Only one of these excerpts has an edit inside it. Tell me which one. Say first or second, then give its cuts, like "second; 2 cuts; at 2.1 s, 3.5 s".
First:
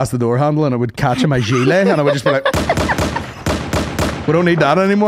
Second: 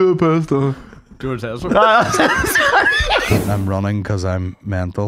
second; 1 cut; at 3.4 s